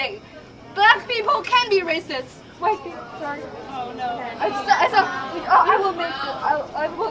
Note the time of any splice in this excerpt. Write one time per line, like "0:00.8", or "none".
none